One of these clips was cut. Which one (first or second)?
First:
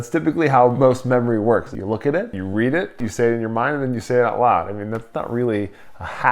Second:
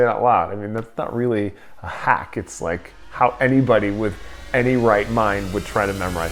first